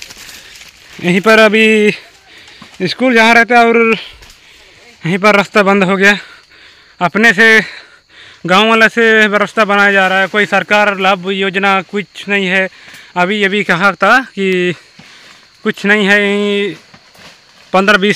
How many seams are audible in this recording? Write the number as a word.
zero